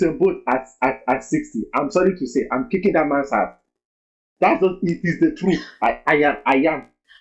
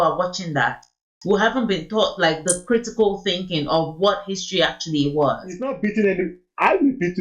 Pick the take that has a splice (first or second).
second